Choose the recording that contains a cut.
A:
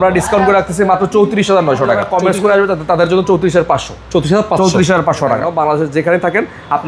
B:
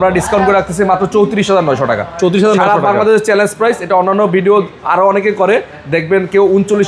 A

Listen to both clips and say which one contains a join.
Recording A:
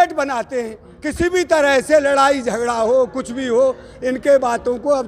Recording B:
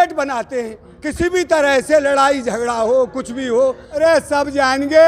B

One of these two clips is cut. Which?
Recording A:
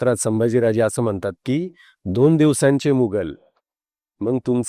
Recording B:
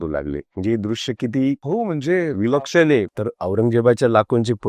B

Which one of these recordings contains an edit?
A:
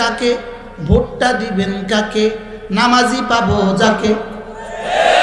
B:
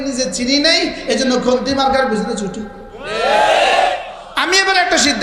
B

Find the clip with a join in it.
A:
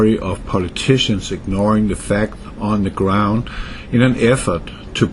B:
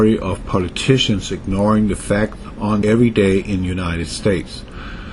A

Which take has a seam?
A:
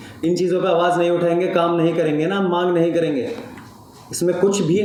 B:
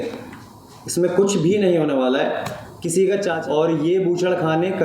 B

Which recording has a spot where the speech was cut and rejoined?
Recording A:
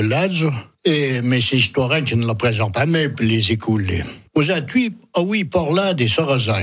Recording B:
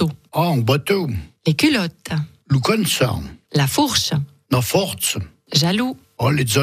A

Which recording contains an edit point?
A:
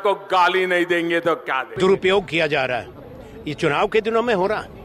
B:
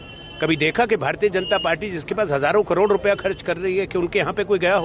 A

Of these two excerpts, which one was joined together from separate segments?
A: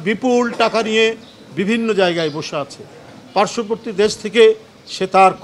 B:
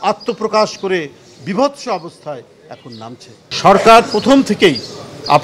B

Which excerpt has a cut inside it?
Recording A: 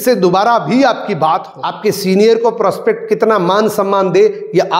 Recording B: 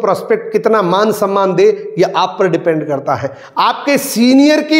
A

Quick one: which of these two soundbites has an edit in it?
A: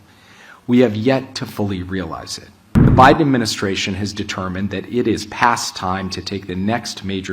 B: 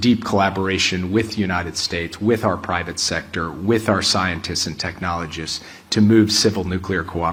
A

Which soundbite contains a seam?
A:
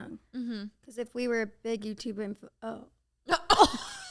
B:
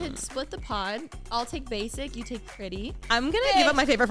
B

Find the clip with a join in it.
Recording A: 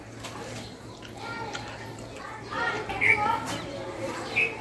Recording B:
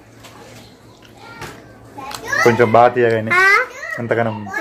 B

